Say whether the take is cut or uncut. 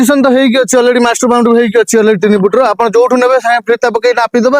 uncut